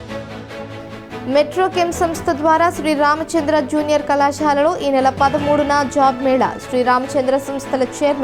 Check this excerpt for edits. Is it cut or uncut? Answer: cut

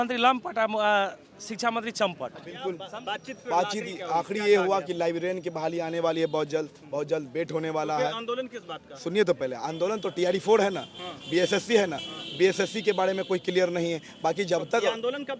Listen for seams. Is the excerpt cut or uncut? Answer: cut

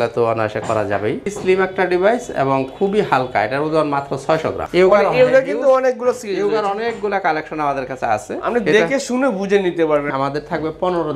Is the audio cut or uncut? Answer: cut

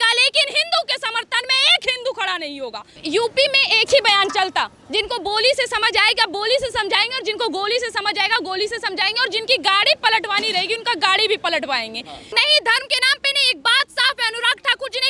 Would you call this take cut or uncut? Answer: cut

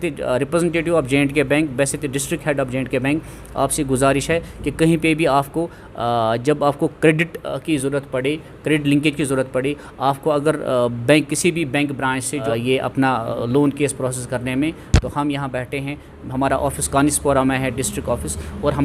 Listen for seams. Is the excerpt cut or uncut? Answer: cut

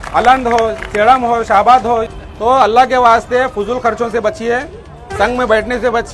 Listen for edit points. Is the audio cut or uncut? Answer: cut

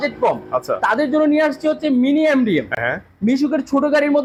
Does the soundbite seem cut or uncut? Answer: uncut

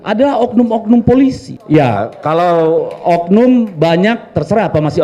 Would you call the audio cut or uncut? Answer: cut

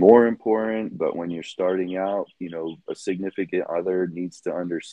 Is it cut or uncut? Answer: uncut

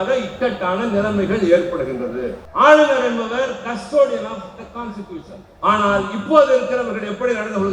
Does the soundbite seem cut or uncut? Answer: cut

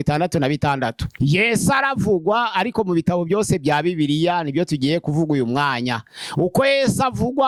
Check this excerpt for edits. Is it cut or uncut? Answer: uncut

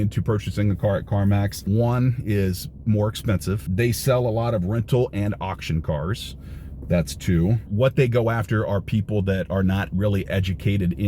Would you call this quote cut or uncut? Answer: cut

